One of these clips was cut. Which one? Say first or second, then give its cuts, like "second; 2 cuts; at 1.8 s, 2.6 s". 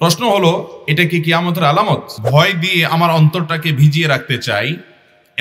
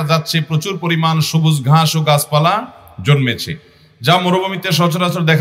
first; 1 cut; at 2.2 s